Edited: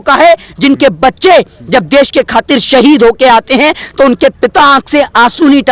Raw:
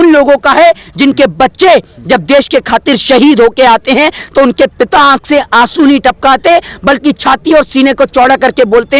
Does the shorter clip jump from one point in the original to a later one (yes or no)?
no